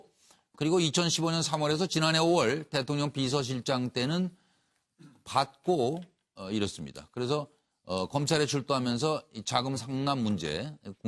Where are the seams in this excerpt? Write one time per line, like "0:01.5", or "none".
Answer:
none